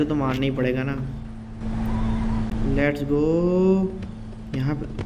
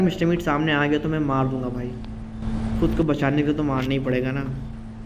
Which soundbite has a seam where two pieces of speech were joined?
first; 1 cut; at 2.5 s

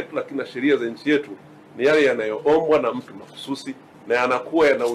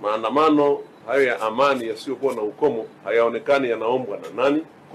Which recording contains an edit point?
second; 1 cut; at 0.9 s

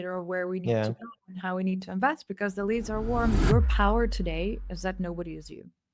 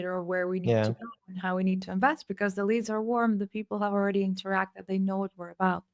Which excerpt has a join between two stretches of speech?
first; 1 cut; at 3.4 s

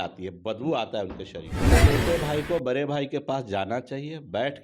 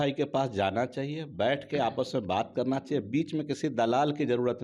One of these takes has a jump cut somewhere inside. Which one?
first; 1 cut; at 1.7 s

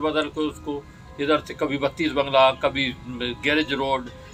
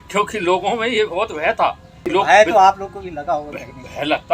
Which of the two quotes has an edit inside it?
second; 1 cut; at 2.0 s

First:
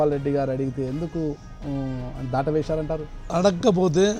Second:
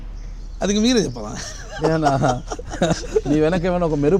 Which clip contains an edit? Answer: first; 1 cut; at 3.3 s

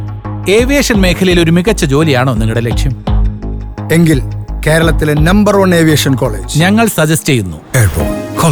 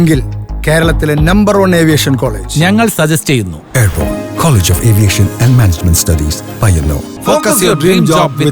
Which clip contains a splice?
second; 1 cut; at 7.1 s

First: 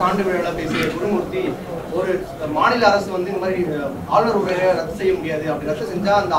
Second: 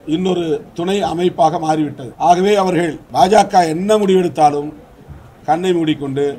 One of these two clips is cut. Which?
second; 2 cuts; at 2.0 s, 3.0 s

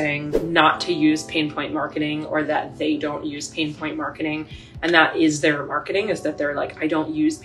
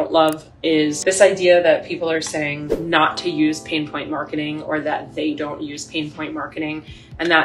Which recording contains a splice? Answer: second; 1 cut; at 1.0 s

